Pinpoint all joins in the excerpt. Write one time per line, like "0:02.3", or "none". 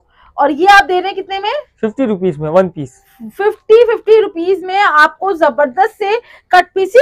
none